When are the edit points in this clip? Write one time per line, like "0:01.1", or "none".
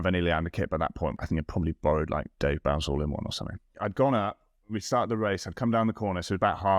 0:01.2
0:03.7